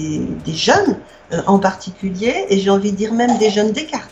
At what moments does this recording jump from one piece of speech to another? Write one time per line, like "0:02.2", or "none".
none